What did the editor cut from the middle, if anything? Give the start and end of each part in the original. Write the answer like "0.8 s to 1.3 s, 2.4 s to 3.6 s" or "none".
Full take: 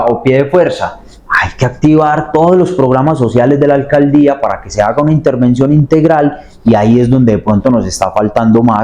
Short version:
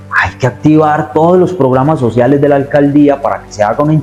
none